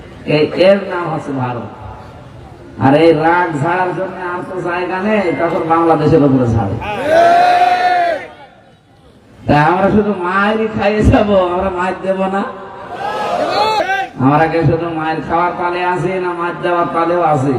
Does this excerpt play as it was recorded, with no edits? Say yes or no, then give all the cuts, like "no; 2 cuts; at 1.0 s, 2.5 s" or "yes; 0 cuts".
no; 1 cut; at 13.8 s